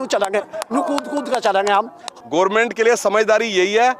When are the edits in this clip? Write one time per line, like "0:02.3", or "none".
0:02.0